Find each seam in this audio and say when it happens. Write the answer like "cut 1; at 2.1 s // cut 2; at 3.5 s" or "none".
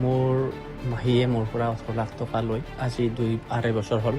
cut 1; at 2.7 s